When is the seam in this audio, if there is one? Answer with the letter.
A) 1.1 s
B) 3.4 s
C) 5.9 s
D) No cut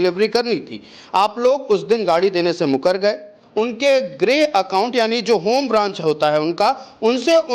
B